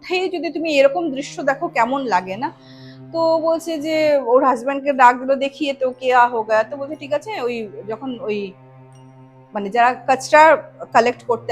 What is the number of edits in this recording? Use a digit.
0